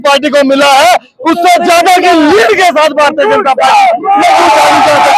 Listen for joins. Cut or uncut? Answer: uncut